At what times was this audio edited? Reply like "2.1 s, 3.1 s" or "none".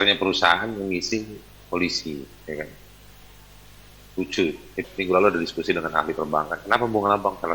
4.8 s